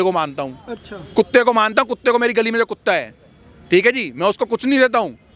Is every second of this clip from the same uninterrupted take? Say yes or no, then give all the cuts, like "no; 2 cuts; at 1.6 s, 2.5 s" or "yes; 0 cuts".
yes; 0 cuts